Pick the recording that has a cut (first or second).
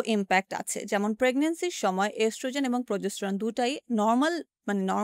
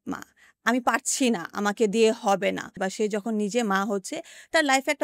second